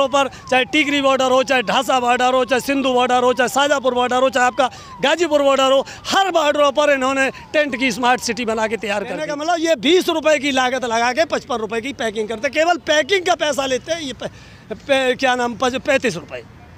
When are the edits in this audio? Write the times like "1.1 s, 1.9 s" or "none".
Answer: 9.3 s